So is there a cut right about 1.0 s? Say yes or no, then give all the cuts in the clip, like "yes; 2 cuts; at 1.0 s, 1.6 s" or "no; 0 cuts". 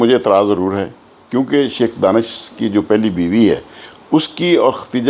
no; 0 cuts